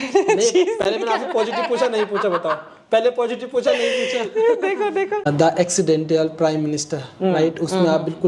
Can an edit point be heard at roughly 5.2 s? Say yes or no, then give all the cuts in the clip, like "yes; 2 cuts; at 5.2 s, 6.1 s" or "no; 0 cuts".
yes; 1 cut; at 5.2 s